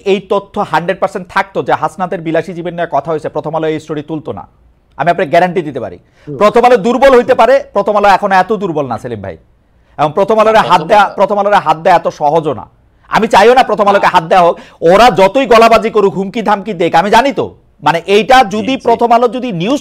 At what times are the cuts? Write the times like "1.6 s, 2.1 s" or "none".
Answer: none